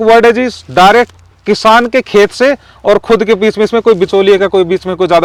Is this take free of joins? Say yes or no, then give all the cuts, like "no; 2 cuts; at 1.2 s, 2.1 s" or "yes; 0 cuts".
yes; 0 cuts